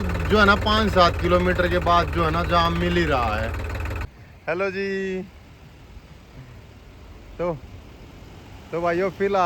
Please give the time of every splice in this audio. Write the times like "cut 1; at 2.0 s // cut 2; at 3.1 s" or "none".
cut 1; at 4.0 s